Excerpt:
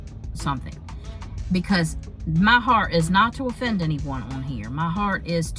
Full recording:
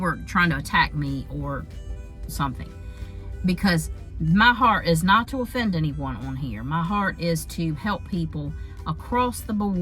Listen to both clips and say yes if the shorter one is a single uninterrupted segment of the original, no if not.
yes